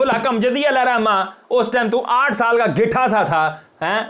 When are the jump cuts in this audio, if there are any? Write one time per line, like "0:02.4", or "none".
none

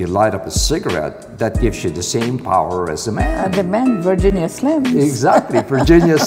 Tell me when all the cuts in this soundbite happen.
none

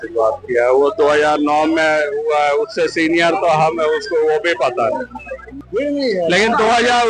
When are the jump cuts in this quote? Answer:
0:05.6

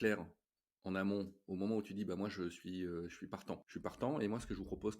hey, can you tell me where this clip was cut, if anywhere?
0:03.6

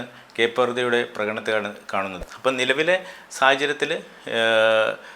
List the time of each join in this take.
0:02.2

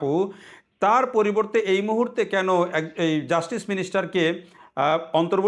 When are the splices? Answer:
none

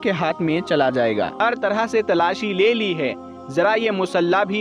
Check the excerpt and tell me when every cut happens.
0:01.3

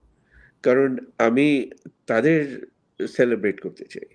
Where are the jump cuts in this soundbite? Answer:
none

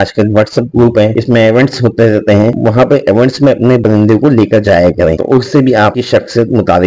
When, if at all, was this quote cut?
none

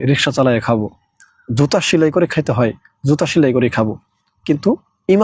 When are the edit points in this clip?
none

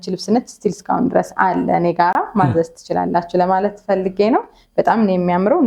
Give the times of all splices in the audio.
none

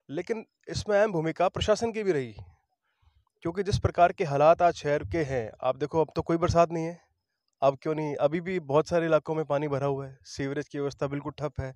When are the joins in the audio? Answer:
none

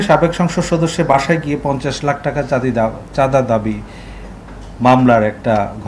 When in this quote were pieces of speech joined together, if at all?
none

